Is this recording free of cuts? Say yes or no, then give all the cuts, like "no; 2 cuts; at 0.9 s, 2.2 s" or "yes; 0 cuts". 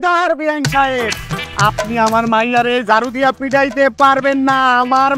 yes; 0 cuts